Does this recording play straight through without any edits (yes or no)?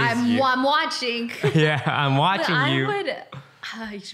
yes